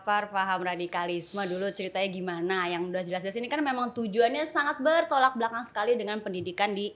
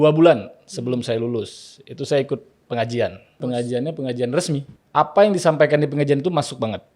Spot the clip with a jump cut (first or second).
second